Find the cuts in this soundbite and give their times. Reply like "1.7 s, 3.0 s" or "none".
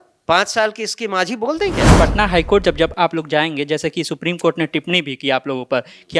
1.9 s